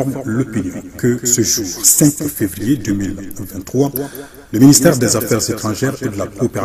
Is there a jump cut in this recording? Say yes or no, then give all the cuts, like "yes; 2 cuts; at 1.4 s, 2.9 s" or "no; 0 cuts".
no; 0 cuts